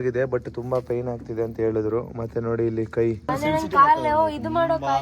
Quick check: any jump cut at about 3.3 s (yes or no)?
yes